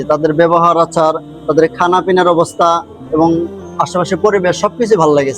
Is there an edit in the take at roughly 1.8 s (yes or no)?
no